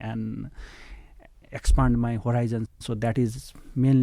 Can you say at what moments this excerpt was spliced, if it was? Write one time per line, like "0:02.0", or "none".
0:02.8